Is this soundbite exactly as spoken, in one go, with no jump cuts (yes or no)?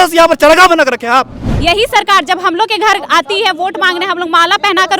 no